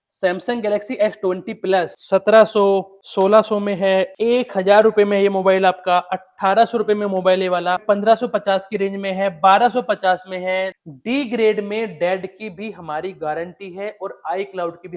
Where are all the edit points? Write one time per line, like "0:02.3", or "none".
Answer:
0:02.0
0:03.0
0:04.1
0:07.8
0:10.8